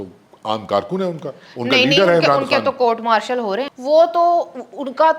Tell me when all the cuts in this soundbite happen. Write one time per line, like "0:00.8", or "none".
0:03.7